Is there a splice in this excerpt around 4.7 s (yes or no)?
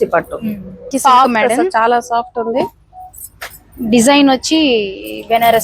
no